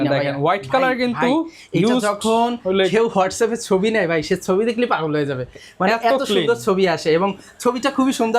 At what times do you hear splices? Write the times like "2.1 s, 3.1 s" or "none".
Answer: none